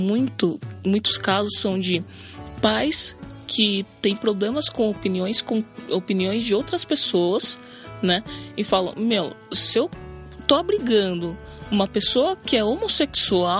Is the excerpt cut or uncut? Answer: uncut